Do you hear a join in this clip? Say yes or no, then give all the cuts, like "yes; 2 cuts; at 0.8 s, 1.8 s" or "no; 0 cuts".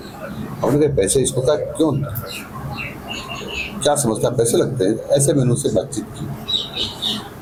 no; 0 cuts